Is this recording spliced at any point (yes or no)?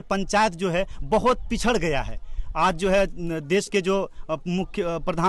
no